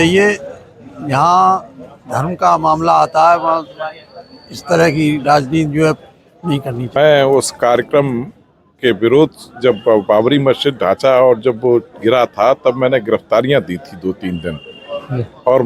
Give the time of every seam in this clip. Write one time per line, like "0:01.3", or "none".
0:07.0